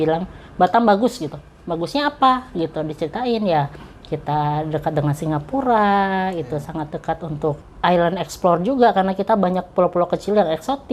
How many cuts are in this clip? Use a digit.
1